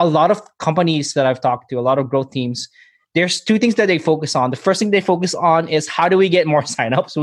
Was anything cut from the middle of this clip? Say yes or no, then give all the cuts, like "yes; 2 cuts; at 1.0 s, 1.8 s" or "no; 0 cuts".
no; 0 cuts